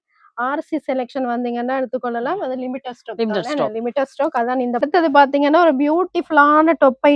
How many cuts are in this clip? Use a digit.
1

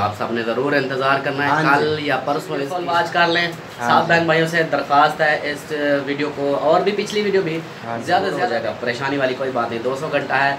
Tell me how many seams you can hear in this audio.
2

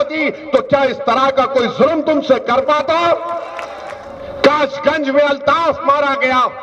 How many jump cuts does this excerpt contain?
0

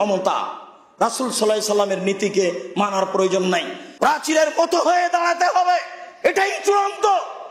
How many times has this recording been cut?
1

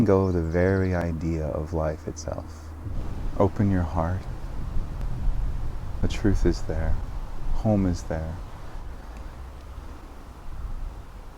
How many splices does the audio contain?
2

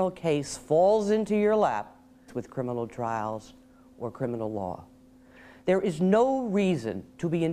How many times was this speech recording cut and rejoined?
0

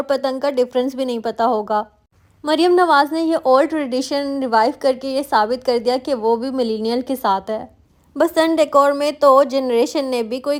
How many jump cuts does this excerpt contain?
0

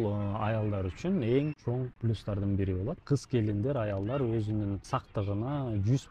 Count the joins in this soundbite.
2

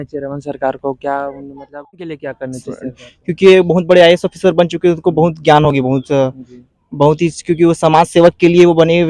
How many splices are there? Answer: 1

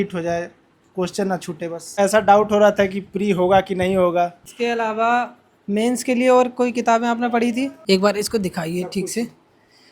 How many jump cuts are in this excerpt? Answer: 3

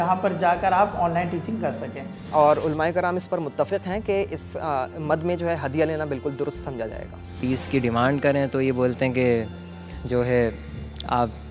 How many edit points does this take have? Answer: 2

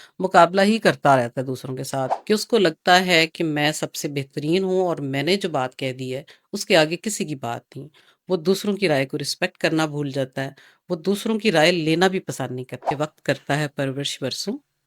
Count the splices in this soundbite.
2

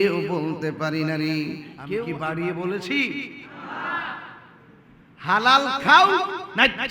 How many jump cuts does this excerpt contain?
1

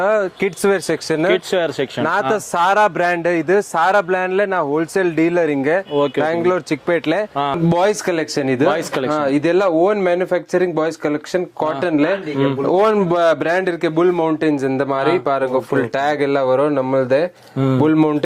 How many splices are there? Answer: 1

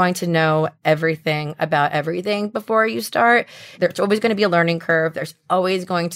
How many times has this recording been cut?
1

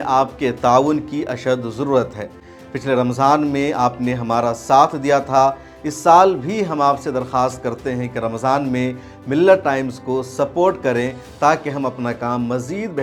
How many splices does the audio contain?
0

